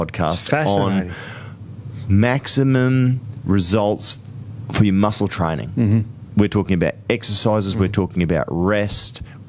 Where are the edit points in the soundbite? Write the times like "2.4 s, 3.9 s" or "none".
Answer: none